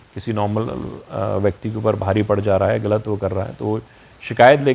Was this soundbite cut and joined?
no; 0 cuts

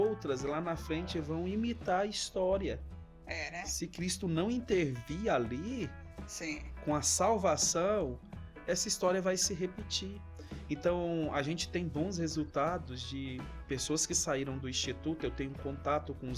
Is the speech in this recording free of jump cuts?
yes; 0 cuts

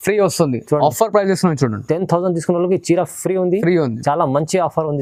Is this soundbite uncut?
yes; 0 cuts

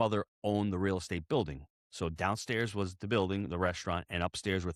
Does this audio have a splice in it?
no; 0 cuts

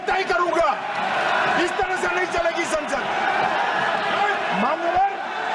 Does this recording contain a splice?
no; 0 cuts

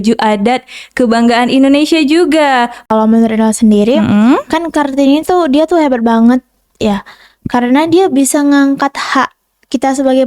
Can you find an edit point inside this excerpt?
yes; 1 cut; at 2.8 s

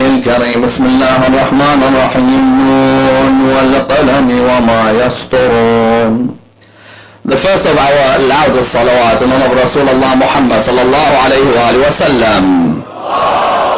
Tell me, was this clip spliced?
yes; 1 cut; at 4.2 s

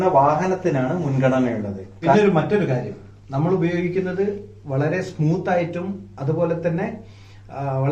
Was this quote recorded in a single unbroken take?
no; 1 cut; at 2.1 s

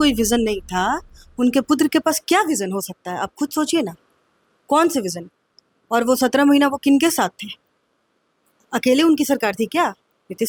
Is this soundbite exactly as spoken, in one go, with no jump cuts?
yes; 0 cuts

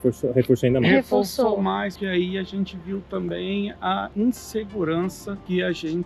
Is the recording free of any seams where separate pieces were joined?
no; 1 cut; at 2.0 s

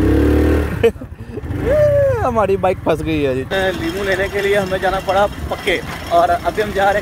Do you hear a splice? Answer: yes; 2 cuts; at 3.5 s, 5.9 s

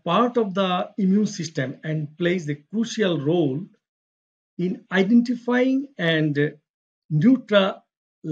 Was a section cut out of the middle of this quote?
no; 0 cuts

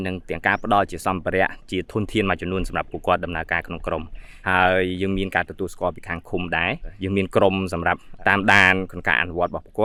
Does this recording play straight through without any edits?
yes; 0 cuts

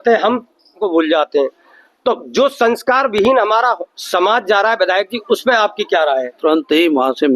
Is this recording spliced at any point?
yes; 2 cuts; at 0.8 s, 6.3 s

